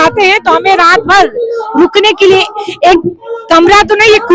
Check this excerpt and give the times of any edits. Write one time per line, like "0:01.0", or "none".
none